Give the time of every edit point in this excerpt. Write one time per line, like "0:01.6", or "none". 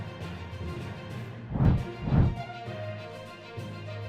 0:01.4